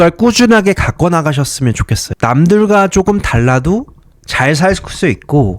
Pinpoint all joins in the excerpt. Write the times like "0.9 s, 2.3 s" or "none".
2.1 s